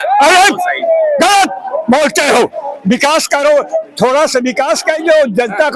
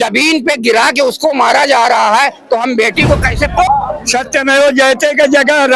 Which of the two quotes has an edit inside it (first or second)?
second